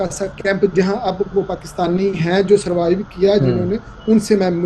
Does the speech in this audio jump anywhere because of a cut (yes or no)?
no